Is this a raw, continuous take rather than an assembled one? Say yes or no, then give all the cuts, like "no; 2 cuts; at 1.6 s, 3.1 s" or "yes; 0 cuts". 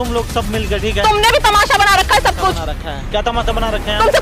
yes; 0 cuts